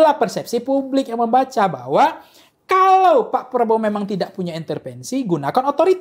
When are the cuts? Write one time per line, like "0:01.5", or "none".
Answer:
none